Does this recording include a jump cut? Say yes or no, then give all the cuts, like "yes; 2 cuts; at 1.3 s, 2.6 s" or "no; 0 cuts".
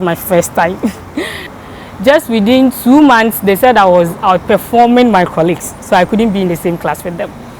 yes; 1 cut; at 1.5 s